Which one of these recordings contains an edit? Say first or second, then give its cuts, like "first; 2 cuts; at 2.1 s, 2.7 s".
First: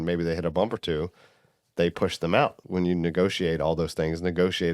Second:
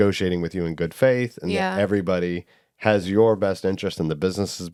first; 1 cut; at 2.6 s